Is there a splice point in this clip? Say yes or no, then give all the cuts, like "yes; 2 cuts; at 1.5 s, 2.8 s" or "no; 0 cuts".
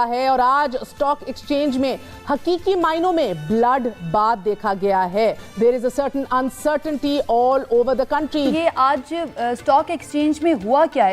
yes; 2 cuts; at 5.5 s, 8.5 s